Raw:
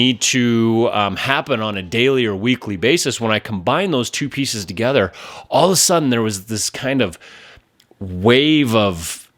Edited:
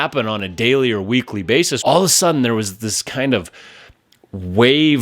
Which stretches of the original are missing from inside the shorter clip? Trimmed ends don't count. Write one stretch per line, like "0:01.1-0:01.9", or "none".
0:03.1-0:05.4